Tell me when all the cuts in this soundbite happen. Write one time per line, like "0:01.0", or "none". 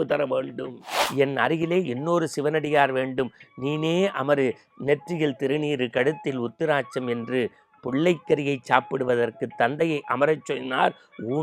0:01.0